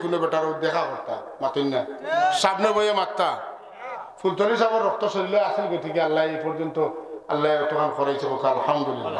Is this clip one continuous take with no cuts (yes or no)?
yes